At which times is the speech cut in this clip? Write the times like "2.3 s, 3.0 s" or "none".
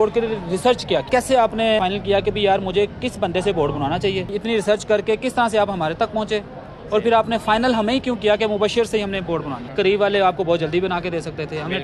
1.1 s, 1.8 s, 4.3 s, 9.6 s